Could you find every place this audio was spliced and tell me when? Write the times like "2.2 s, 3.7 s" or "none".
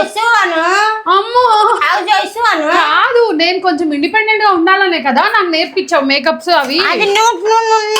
1.6 s